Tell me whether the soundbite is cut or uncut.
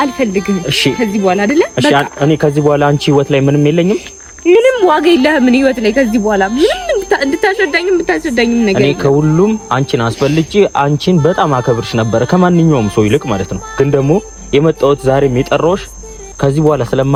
uncut